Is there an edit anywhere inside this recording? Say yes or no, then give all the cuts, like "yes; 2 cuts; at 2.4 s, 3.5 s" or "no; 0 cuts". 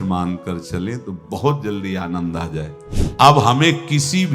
yes; 1 cut; at 3.2 s